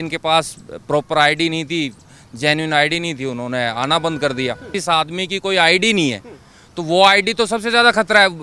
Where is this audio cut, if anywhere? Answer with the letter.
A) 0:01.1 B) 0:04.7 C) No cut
B